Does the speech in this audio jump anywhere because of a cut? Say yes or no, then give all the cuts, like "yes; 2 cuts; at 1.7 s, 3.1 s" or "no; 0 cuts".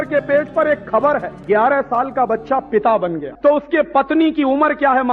yes; 2 cuts; at 1.4 s, 3.3 s